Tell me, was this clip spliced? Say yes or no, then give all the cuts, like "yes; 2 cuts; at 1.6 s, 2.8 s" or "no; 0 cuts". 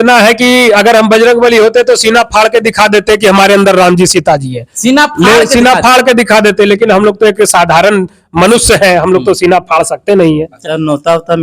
yes; 1 cut; at 10.5 s